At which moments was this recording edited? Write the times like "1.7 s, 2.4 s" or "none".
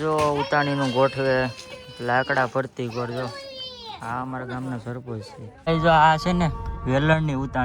5.7 s